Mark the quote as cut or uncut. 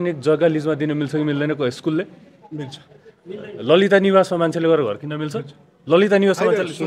uncut